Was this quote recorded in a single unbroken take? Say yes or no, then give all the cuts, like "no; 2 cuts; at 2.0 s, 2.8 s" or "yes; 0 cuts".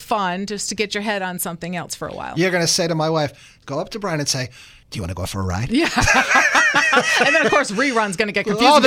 yes; 0 cuts